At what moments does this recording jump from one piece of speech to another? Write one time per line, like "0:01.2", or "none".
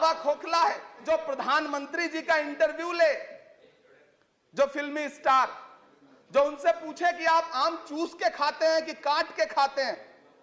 0:01.0